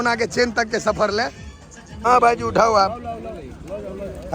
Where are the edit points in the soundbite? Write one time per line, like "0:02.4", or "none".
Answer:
0:01.9